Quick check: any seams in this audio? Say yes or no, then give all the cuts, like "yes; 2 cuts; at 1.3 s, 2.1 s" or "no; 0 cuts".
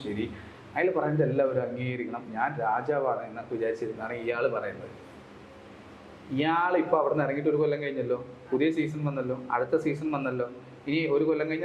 no; 0 cuts